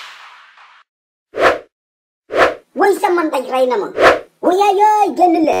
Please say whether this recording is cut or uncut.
cut